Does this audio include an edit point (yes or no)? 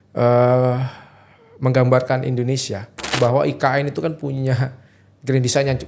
yes